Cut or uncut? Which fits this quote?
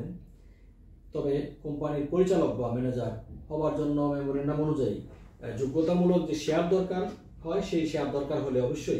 uncut